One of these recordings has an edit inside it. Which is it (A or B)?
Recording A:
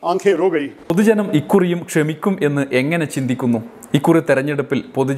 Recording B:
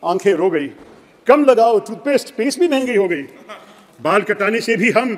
A